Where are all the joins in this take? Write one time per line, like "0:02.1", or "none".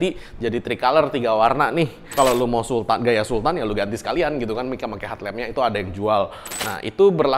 0:02.2
0:06.4